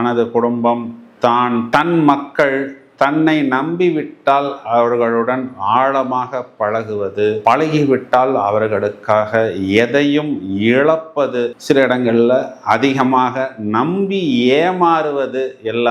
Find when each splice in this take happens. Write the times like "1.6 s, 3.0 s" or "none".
none